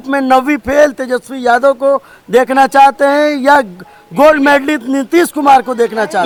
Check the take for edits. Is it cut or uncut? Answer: uncut